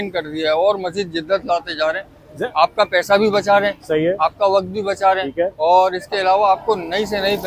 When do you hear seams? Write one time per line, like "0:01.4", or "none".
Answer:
none